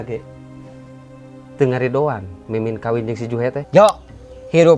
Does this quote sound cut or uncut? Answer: cut